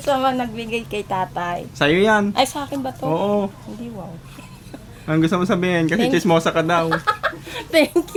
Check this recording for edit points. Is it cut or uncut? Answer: uncut